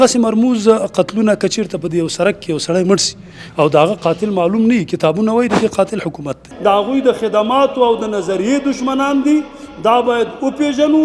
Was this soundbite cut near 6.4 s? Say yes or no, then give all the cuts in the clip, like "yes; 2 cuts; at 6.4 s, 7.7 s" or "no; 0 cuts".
yes; 1 cut; at 6.4 s